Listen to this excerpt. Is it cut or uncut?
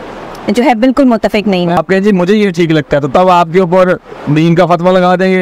cut